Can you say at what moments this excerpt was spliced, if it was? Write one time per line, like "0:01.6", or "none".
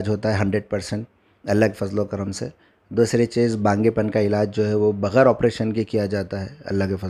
none